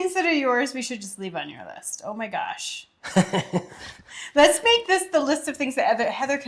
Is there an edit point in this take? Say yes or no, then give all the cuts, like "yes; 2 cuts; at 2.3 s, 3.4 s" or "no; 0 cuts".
no; 0 cuts